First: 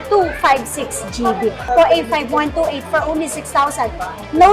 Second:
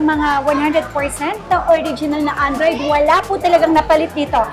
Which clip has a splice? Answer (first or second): first